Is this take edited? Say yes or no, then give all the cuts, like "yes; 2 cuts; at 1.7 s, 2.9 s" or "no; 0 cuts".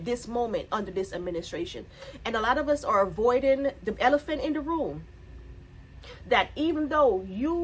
no; 0 cuts